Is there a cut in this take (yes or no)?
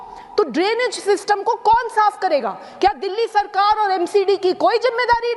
no